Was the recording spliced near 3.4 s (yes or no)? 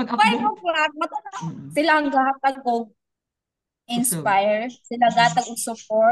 no